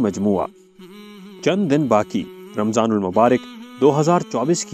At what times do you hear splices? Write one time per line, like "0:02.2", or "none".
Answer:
none